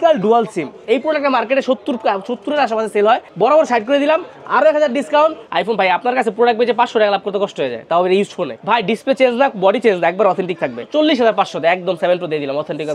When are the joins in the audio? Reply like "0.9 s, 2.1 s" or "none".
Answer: 3.3 s, 5.4 s, 8.5 s, 10.9 s